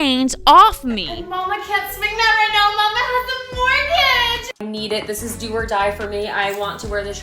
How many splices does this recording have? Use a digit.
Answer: 2